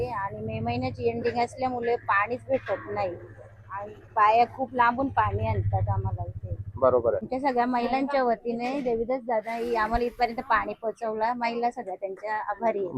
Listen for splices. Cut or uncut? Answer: uncut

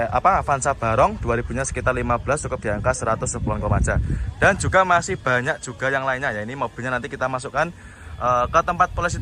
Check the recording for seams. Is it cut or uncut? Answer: uncut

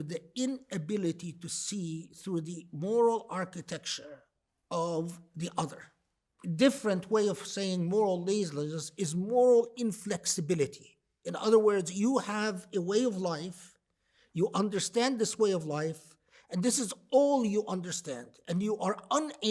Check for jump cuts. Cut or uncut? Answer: cut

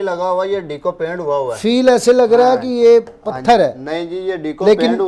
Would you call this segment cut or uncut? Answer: uncut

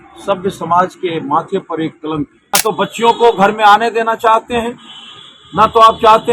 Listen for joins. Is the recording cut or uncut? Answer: cut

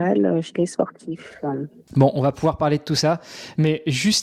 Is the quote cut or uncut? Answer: uncut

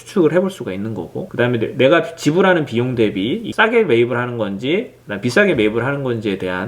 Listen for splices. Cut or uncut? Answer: uncut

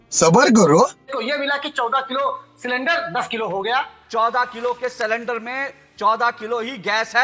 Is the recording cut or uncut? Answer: cut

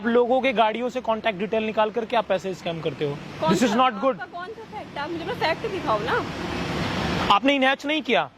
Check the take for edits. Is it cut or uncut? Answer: uncut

